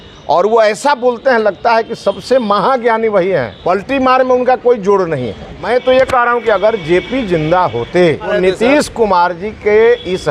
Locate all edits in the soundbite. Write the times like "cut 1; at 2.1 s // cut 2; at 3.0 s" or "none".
cut 1; at 3.5 s // cut 2; at 5.5 s // cut 3; at 8.3 s